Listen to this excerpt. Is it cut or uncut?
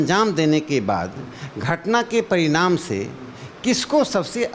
uncut